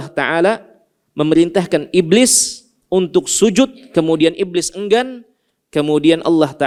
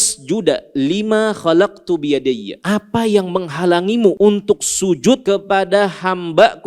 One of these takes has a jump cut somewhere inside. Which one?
second; 3 cuts; at 2.5 s, 4.2 s, 5.2 s

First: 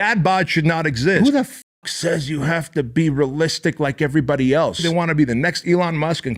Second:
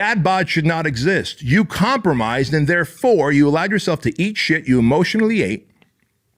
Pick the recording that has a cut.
first; 2 cuts; at 1.2 s, 4.8 s

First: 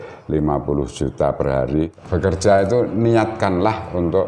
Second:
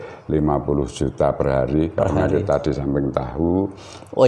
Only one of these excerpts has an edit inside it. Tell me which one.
first; 1 cut; at 1.9 s

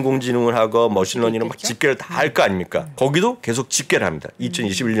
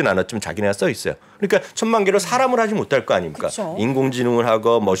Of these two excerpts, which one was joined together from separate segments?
first; 1 cut; at 2.9 s

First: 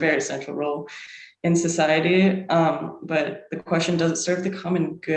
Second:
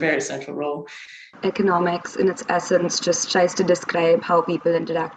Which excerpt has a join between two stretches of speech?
second; 1 cut; at 1.3 s

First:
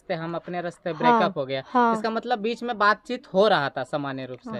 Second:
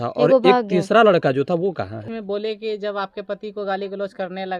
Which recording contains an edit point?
second; 1 cut; at 2.0 s

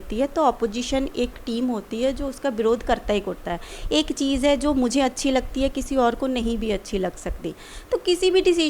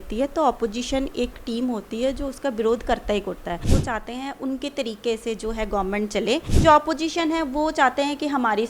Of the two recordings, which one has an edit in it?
second; 2 cuts; at 3.7 s, 6.5 s

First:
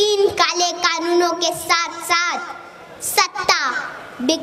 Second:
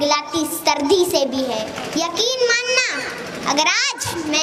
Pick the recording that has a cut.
second; 1 cut; at 1.8 s

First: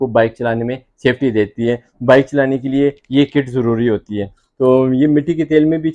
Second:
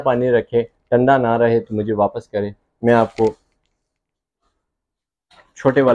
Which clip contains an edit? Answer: first; 1 cut; at 4.4 s

